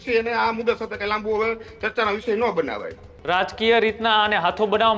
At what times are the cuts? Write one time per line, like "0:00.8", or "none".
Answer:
0:03.1